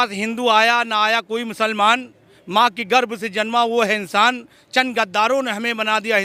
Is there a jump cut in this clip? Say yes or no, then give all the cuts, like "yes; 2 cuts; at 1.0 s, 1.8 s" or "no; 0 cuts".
no; 0 cuts